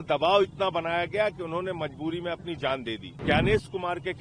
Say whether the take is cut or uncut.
cut